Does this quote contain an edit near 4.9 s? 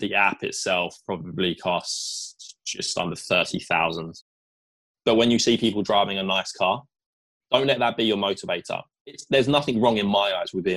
yes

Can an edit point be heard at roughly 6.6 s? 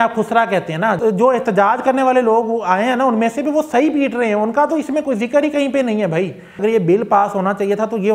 yes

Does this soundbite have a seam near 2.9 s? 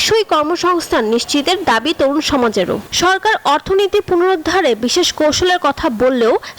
yes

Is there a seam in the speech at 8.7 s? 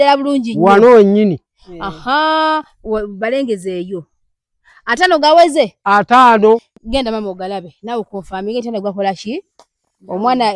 no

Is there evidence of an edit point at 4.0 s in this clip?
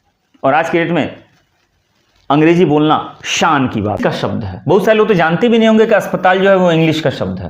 yes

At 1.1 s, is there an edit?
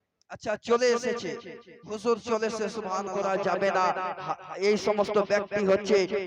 no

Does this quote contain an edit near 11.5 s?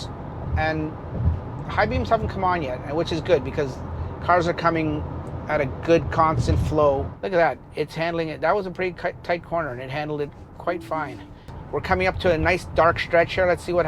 yes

